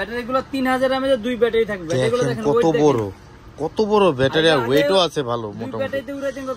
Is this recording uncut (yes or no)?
yes